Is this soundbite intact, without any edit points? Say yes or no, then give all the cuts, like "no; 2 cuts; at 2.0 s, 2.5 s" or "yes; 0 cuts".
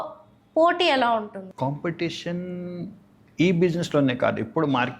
no; 1 cut; at 1.4 s